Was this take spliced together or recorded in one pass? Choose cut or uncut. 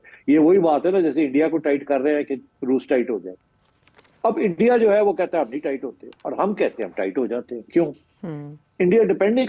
uncut